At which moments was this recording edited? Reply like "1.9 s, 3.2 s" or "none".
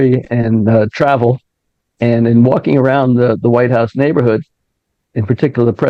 none